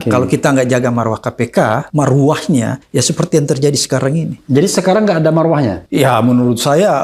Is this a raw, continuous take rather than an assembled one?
no; 4 cuts; at 1.9 s, 2.8 s, 4.4 s, 5.8 s

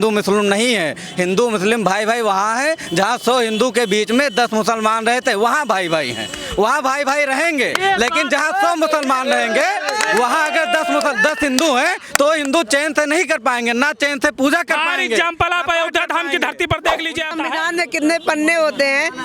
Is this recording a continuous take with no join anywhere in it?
no; 1 cut; at 17.3 s

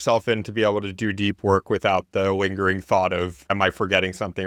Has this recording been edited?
no; 0 cuts

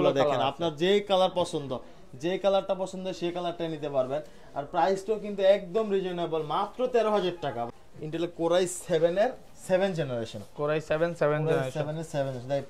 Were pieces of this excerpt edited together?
yes; 1 cut; at 7.6 s

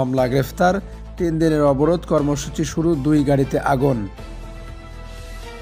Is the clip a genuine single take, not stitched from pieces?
yes; 0 cuts

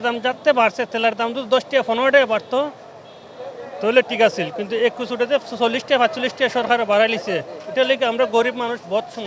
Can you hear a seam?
no; 0 cuts

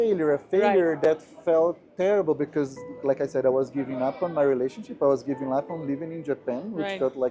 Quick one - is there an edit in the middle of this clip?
no; 0 cuts

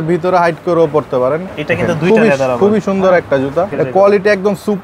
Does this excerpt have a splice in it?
yes; 2 cuts; at 1.5 s, 3.7 s

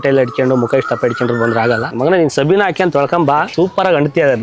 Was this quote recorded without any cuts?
no; 2 cuts; at 1.9 s, 3.5 s

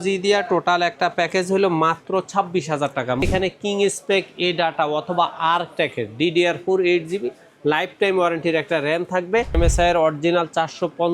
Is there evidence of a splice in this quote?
yes; 2 cuts; at 3.2 s, 9.6 s

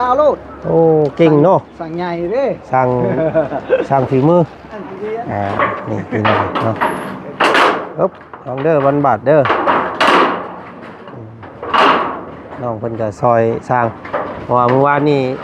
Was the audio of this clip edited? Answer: yes; 1 cut; at 4.8 s

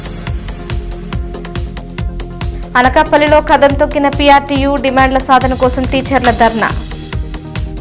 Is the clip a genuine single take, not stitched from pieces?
yes; 0 cuts

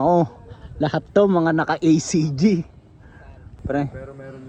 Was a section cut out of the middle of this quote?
no; 0 cuts

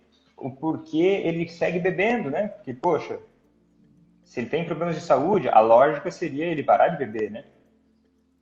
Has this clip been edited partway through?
no; 0 cuts

